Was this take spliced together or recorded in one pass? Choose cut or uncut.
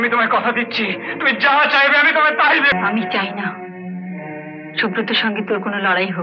cut